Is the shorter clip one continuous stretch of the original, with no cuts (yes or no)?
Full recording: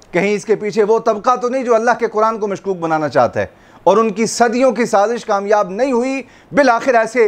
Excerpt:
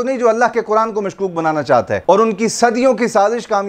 no